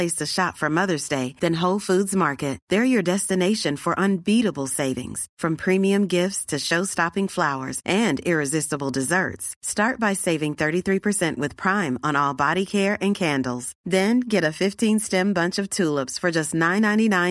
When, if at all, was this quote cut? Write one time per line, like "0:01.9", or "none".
none